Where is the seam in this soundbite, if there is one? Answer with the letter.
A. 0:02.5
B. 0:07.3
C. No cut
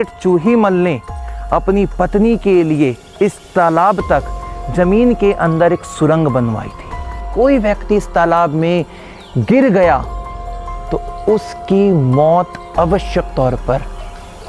B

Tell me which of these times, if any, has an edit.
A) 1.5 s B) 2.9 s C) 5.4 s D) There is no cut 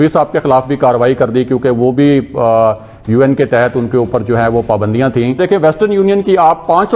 C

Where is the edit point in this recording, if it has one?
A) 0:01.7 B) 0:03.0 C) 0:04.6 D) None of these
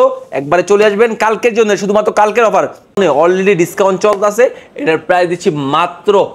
B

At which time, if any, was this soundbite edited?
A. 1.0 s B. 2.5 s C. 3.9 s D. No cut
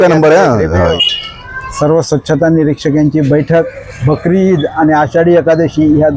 A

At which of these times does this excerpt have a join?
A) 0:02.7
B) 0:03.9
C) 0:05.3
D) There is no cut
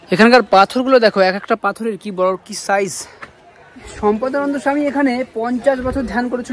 B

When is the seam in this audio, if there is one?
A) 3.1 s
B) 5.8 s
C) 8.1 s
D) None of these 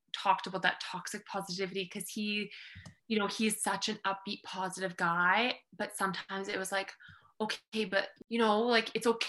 C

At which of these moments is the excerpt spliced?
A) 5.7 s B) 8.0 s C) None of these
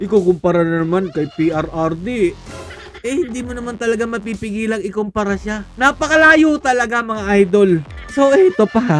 B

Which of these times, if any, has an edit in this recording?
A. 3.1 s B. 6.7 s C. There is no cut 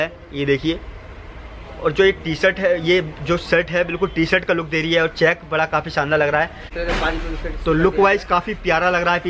B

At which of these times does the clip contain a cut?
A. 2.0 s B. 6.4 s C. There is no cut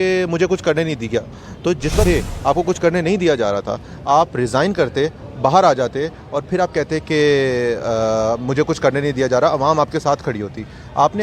A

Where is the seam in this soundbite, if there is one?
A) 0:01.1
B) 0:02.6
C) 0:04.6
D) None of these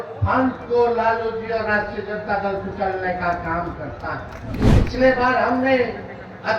C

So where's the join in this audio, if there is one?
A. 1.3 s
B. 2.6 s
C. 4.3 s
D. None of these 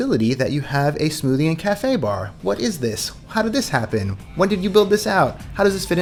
D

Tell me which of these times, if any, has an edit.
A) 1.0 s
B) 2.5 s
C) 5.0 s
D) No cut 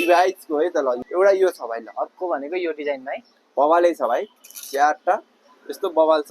A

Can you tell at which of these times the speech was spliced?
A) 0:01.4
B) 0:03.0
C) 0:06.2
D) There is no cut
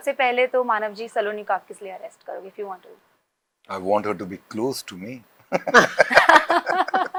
D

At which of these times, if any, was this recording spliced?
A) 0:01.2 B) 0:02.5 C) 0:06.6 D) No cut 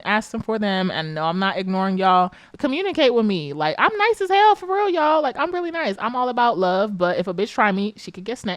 B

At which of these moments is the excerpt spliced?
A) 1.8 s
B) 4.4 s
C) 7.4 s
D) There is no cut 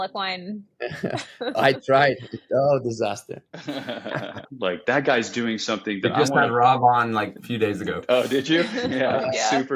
B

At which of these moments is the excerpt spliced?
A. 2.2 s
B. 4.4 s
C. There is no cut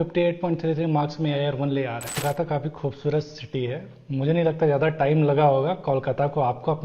A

